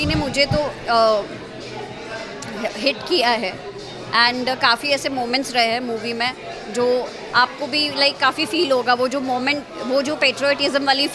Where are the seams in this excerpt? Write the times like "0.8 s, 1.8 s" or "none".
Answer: none